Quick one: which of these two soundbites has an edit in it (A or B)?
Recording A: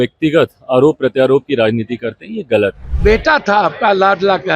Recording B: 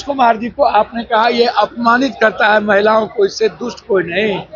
A